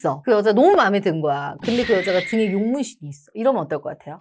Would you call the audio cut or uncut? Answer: cut